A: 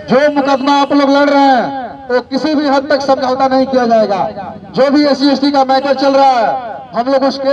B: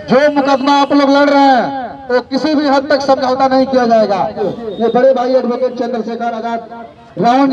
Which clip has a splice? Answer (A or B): B